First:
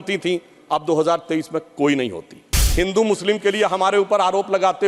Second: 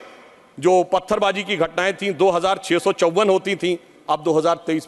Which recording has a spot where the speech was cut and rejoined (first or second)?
first